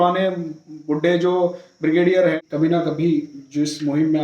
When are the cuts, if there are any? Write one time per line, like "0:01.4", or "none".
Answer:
0:02.4